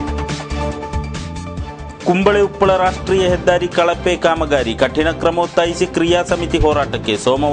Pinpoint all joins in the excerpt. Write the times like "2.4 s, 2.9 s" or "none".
1.8 s